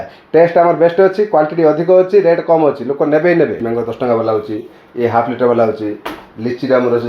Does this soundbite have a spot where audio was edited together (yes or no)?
yes